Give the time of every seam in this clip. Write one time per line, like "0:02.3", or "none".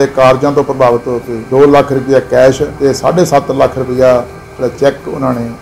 0:01.4
0:02.7